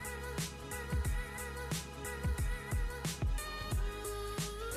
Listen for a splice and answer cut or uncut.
uncut